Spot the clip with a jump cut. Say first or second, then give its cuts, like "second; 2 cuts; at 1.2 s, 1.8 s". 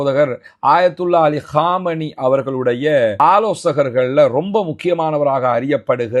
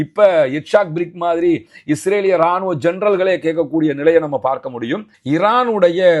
second; 1 cut; at 5.1 s